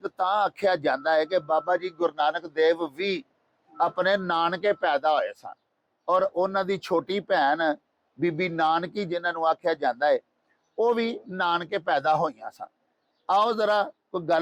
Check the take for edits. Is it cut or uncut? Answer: uncut